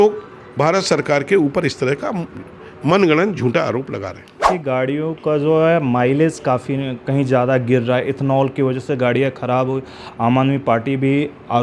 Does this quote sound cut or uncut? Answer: cut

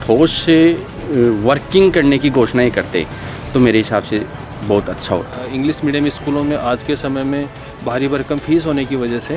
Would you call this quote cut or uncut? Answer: cut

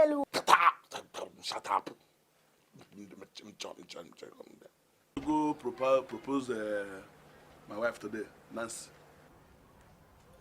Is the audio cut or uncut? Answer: cut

